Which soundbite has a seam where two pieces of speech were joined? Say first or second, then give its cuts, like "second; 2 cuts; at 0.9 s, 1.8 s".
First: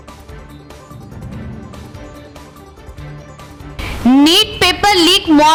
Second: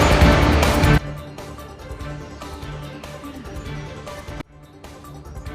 second; 1 cut; at 1.0 s